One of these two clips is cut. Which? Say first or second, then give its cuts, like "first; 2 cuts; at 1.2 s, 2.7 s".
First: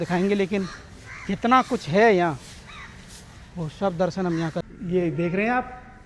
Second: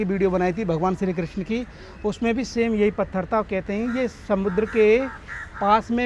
first; 1 cut; at 4.6 s